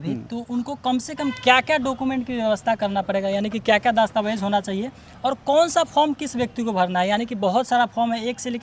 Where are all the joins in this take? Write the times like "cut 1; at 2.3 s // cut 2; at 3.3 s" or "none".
none